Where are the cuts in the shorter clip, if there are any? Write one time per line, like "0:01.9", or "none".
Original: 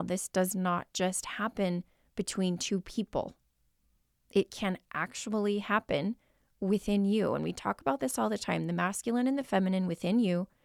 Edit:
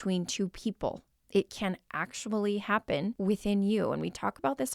0:01.1
0:03.2